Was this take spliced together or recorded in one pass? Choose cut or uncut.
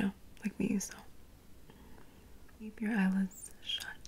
cut